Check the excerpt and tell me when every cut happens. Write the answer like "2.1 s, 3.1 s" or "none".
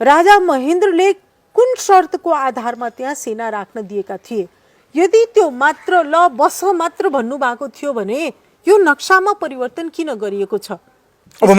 none